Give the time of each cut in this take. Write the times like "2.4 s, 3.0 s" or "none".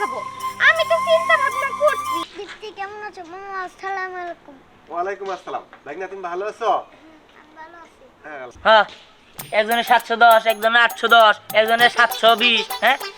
2.3 s, 8.5 s